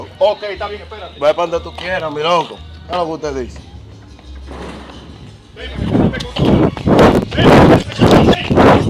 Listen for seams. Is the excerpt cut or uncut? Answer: uncut